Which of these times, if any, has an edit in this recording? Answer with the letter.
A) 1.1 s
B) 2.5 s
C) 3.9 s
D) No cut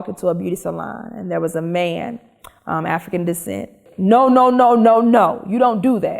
C